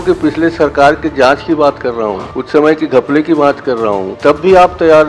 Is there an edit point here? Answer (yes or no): yes